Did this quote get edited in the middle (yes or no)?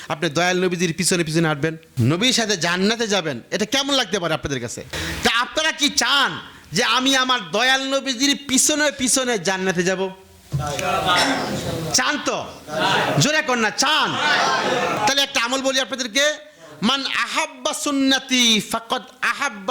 yes